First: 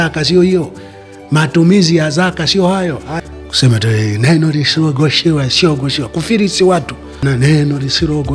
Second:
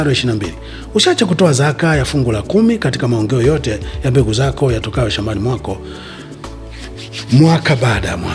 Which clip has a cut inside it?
first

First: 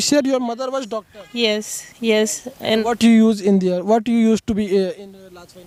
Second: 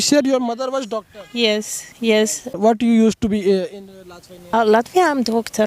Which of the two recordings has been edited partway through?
second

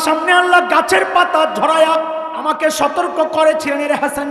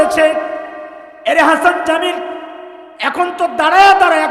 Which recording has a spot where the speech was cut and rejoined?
first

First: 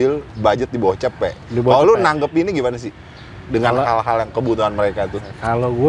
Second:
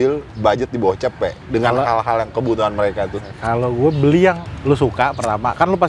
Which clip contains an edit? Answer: second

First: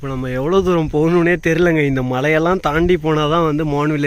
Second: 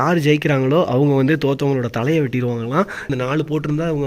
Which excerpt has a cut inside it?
second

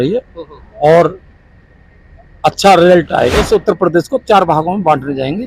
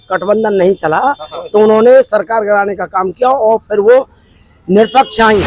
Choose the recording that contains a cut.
first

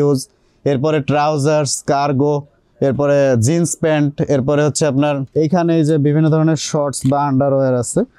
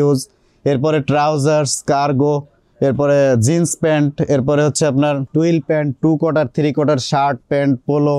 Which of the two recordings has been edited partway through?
first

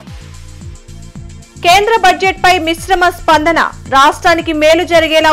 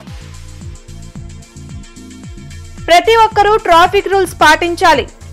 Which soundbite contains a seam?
first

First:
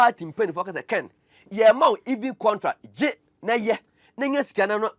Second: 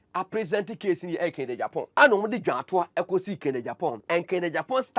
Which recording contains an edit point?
second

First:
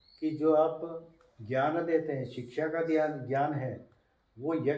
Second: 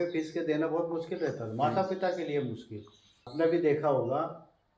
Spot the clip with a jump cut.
second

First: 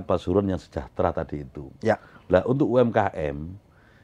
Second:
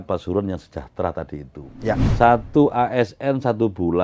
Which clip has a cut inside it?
second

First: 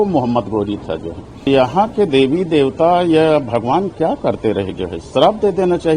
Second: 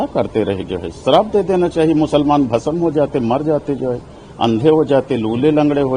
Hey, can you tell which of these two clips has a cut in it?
first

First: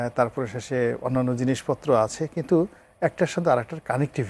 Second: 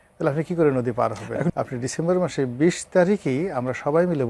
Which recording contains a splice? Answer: second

